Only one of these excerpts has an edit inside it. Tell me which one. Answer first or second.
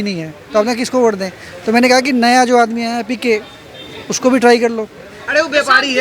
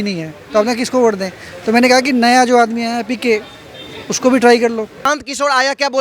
second